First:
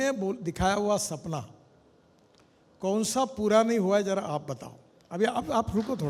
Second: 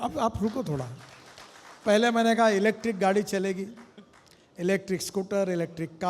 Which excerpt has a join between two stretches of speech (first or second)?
second